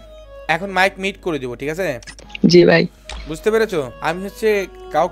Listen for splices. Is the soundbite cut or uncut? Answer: cut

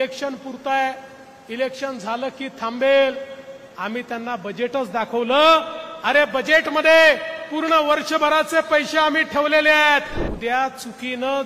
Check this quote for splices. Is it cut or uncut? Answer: cut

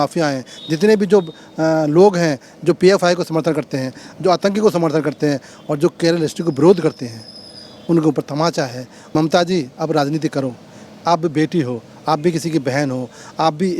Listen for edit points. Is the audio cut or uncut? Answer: cut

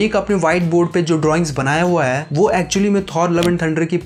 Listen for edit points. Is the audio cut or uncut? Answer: uncut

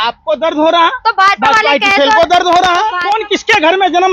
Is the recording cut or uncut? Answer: cut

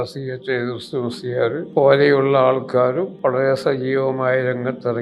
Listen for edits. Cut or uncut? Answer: cut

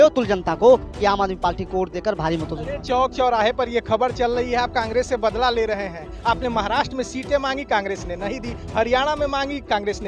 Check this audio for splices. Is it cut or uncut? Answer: uncut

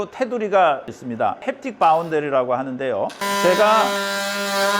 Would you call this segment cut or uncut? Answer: cut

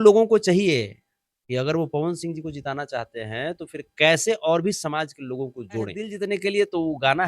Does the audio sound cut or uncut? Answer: cut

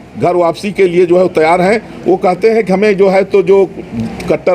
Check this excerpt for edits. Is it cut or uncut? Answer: uncut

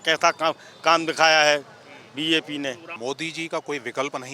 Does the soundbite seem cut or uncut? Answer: cut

